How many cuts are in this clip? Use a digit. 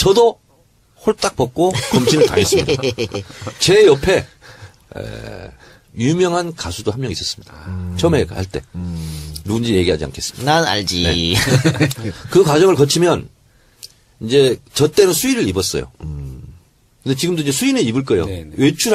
0